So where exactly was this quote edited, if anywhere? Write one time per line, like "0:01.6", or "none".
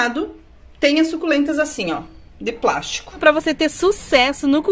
0:03.2